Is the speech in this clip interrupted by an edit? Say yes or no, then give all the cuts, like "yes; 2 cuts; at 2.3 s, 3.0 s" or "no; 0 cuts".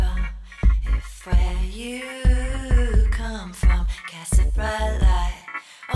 yes; 1 cut; at 3.1 s